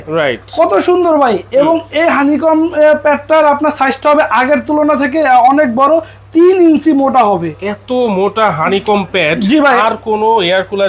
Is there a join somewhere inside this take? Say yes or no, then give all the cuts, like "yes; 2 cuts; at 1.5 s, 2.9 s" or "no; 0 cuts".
no; 0 cuts